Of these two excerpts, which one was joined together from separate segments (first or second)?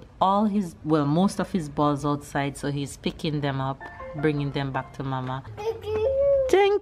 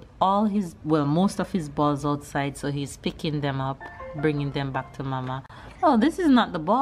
first